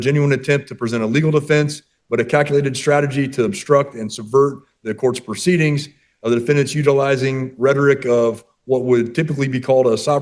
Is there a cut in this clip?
no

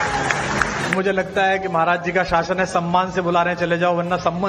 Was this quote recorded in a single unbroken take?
no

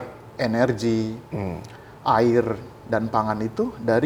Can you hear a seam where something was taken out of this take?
no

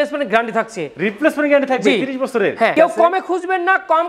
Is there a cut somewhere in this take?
no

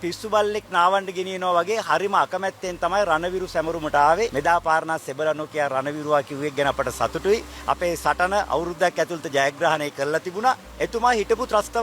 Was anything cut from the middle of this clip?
yes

